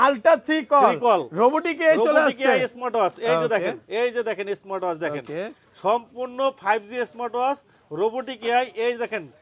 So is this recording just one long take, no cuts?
yes; 0 cuts

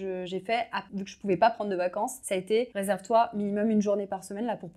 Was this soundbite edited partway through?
yes; 2 cuts; at 0.9 s, 2.5 s

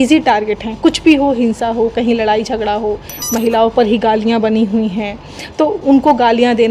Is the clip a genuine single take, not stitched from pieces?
yes; 0 cuts

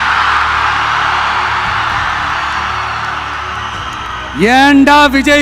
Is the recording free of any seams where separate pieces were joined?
yes; 0 cuts

